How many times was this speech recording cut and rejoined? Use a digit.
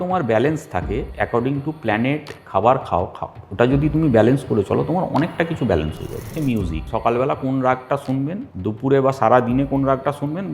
3